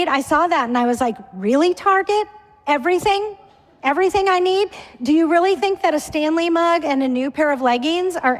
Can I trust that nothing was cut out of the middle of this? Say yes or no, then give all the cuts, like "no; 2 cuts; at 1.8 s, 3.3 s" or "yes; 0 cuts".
yes; 0 cuts